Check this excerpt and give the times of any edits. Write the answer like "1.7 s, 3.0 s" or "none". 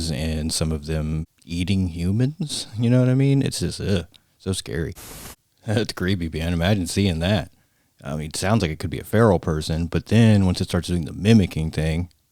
1.4 s, 5.0 s